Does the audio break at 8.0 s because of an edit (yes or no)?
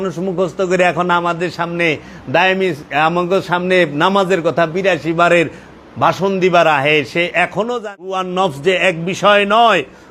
yes